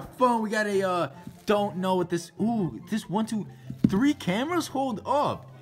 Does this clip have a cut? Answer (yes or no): no